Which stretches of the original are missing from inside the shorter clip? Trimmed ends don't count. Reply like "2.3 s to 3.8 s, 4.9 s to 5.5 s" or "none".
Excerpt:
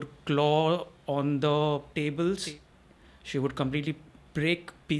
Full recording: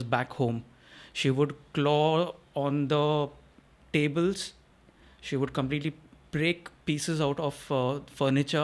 3.4 s to 3.9 s